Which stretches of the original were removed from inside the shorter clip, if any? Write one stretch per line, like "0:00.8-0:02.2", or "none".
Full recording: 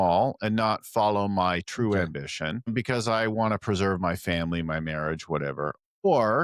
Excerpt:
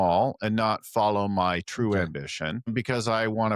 none